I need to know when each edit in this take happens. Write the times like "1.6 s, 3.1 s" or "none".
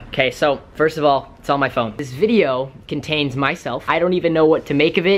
2.0 s, 3.9 s